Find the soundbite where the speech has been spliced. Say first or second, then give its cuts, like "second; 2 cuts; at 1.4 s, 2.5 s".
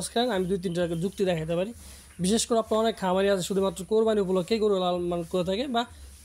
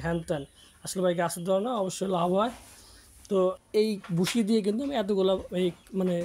second; 1 cut; at 3.6 s